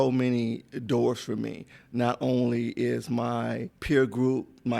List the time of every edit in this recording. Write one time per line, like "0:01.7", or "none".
0:03.7